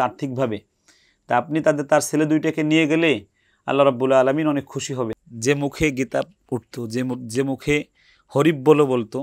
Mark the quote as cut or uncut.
cut